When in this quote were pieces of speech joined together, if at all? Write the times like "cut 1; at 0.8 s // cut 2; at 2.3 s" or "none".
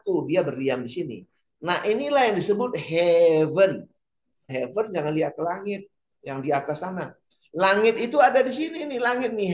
cut 1; at 4.5 s